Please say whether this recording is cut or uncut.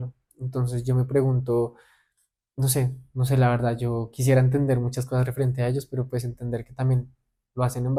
uncut